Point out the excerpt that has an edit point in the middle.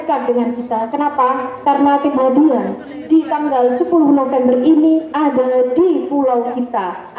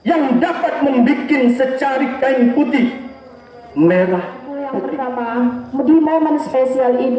second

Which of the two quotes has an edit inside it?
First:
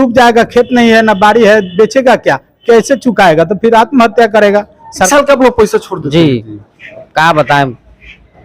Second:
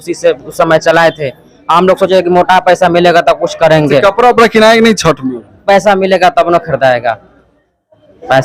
first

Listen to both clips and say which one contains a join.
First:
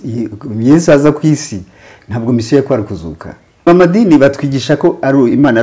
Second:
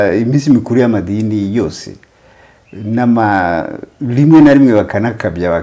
first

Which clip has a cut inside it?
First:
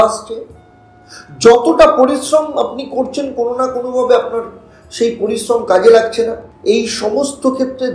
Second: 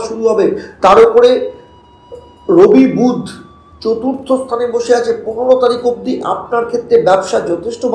first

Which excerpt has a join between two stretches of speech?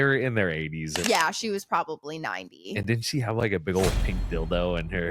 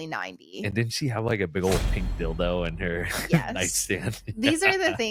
first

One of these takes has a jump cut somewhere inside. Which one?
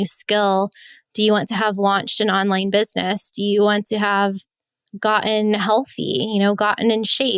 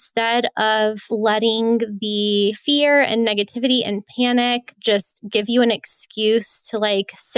second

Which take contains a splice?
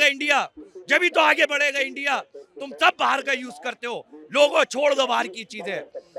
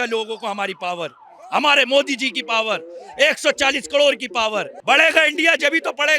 second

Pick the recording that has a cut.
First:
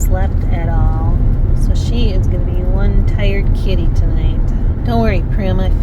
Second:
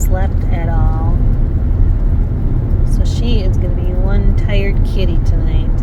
first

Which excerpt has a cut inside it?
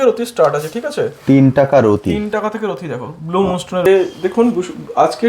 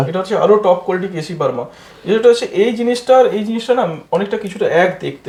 first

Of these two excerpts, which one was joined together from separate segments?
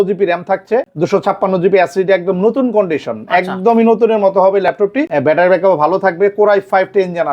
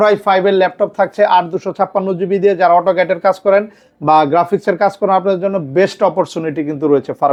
first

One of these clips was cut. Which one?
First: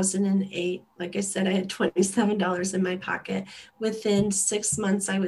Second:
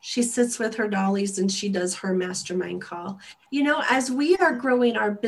second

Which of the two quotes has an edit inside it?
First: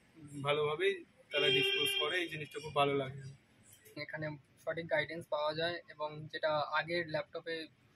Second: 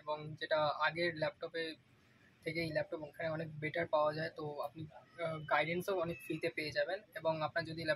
first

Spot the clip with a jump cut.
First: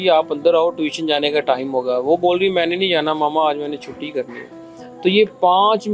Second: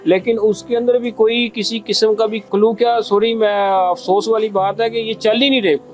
second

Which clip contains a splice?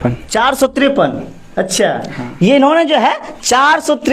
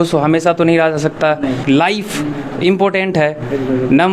second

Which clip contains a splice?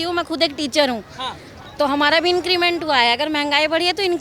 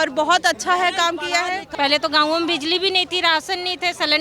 second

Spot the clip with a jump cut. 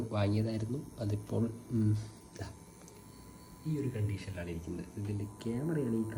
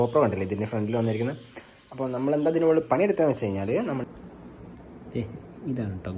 second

